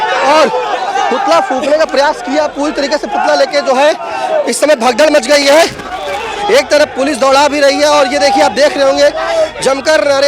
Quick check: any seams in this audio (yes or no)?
no